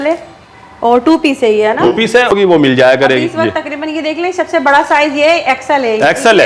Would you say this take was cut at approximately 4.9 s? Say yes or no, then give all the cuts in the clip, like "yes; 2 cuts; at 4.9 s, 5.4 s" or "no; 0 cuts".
no; 1 cut; at 2.3 s